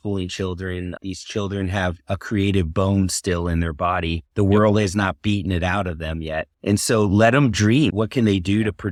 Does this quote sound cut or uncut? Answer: uncut